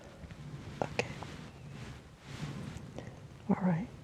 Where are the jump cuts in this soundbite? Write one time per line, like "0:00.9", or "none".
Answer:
none